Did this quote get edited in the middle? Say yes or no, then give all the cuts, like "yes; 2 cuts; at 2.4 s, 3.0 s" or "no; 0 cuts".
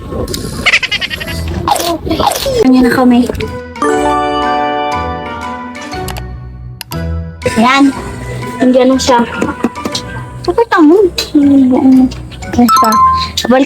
yes; 1 cut; at 2.6 s